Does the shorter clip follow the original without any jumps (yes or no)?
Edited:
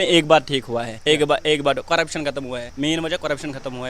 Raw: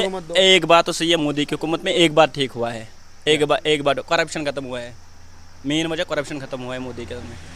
no